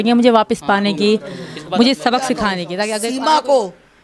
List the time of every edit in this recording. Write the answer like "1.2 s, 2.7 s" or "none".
2.9 s